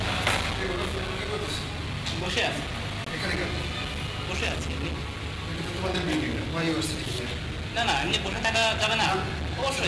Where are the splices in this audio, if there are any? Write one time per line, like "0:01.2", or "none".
0:06.2